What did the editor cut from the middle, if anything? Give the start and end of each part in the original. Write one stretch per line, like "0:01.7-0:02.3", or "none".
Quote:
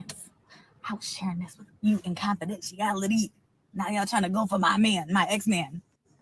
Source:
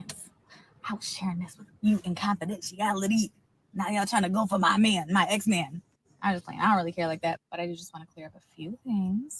none